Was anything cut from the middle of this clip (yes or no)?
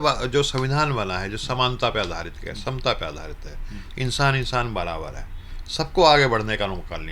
no